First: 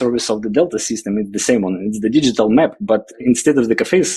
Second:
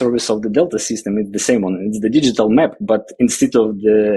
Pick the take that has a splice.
first; 1 cut; at 3.1 s

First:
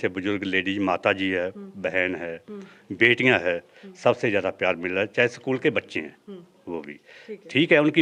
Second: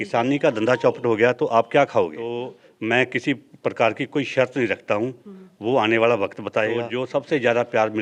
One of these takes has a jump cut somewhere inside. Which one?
second; 2 cuts; at 2.6 s, 6.9 s

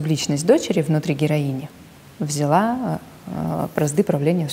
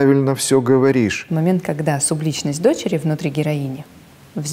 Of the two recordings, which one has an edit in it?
second; 1 cut; at 1.3 s

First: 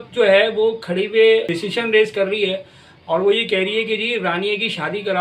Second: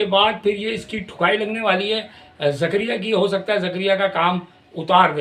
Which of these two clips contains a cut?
first; 1 cut; at 1.5 s

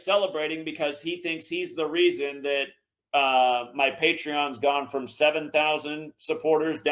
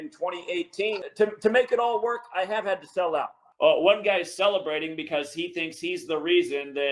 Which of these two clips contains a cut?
second; 2 cuts; at 1.0 s, 3.4 s

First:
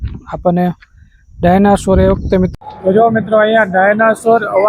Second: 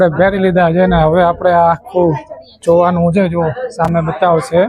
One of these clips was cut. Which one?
first; 1 cut; at 2.5 s

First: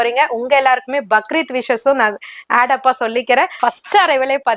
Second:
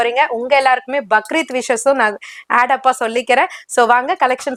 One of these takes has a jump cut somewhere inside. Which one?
first; 1 cut; at 3.5 s

